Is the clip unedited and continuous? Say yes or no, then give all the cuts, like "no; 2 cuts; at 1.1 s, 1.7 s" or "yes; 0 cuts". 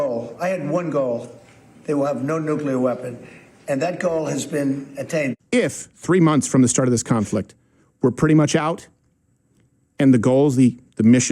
no; 1 cut; at 5.3 s